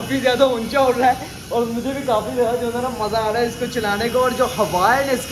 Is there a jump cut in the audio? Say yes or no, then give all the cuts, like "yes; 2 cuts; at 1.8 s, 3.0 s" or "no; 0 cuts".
no; 0 cuts